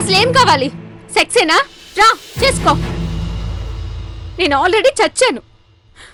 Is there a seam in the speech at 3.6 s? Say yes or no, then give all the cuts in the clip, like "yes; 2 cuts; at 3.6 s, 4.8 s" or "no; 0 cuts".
no; 0 cuts